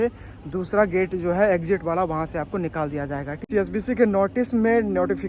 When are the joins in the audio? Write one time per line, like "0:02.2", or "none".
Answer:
0:03.5